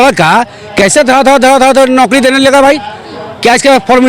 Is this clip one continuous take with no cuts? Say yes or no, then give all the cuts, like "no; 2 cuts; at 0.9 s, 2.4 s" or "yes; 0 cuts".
yes; 0 cuts